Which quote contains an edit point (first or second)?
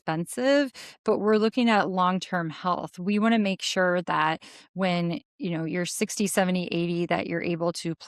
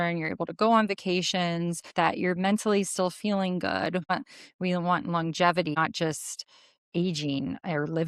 second